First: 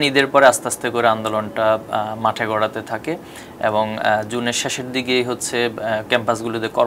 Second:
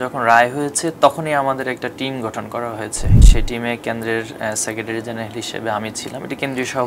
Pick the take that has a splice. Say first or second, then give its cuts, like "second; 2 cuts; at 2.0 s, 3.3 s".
second; 1 cut; at 3.2 s